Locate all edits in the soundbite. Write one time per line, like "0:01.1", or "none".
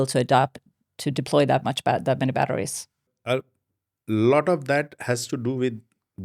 0:03.1